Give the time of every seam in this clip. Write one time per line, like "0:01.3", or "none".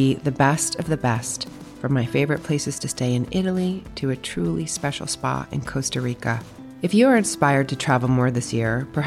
none